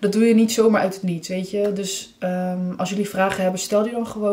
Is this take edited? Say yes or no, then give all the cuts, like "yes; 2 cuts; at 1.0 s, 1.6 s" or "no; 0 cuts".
no; 0 cuts